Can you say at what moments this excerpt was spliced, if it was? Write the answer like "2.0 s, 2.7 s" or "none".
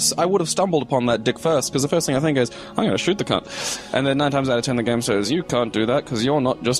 1.2 s